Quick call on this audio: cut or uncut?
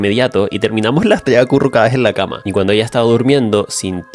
cut